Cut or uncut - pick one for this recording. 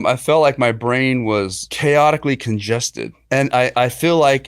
cut